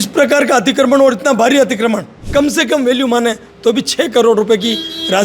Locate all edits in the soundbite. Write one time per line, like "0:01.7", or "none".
0:02.2